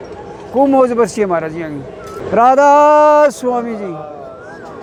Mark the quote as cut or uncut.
uncut